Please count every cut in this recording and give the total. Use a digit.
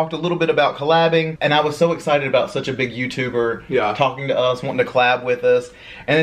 1